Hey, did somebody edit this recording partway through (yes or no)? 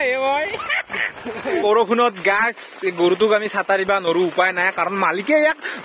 yes